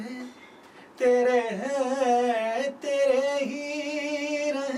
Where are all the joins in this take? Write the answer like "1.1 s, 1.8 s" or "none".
none